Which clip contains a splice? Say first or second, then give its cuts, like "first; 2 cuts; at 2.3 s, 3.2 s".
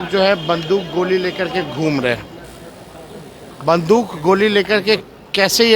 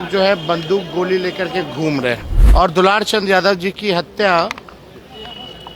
second; 1 cut; at 2.3 s